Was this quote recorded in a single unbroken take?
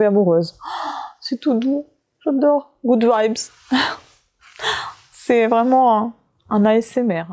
yes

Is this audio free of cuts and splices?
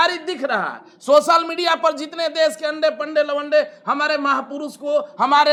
yes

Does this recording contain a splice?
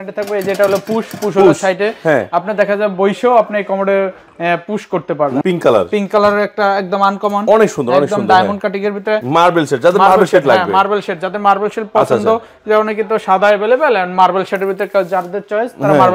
yes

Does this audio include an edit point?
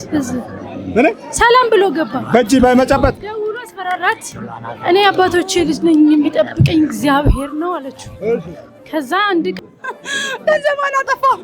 yes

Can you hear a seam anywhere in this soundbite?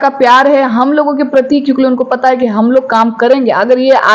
no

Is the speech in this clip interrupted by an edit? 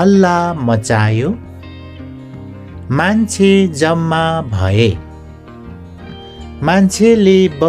no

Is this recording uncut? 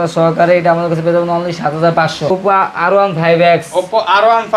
no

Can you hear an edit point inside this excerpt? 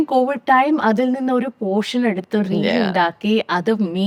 no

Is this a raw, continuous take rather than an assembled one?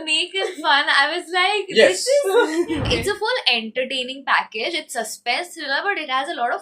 no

